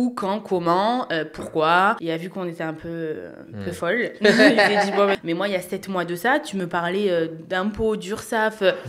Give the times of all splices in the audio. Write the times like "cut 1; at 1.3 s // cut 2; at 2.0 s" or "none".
cut 1; at 2.0 s // cut 2; at 5.2 s